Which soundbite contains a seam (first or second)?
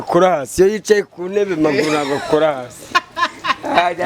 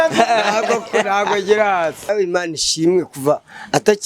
second